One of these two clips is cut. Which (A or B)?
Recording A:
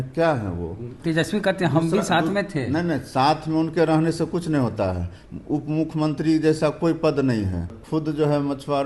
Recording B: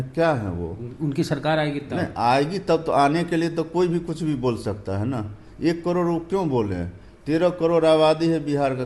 A